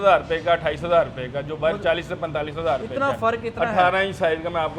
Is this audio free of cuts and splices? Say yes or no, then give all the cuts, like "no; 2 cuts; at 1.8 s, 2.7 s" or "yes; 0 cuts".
yes; 0 cuts